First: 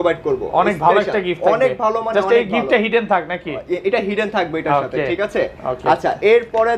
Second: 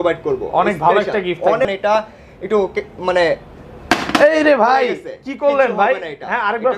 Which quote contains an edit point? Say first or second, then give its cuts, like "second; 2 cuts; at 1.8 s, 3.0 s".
second; 1 cut; at 1.6 s